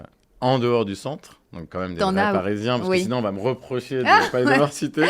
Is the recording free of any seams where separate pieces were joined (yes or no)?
yes